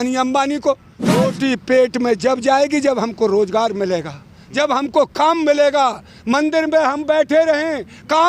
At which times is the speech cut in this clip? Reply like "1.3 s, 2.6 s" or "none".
1.0 s